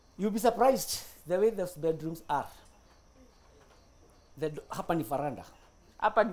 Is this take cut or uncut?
uncut